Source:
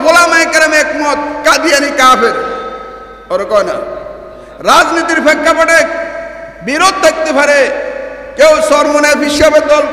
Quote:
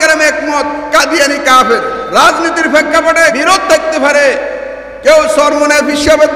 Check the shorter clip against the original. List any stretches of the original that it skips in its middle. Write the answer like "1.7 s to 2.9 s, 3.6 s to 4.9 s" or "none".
2.5 s to 4.5 s, 5.9 s to 6.7 s